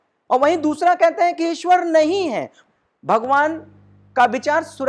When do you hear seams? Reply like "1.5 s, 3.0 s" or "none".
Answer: 2.5 s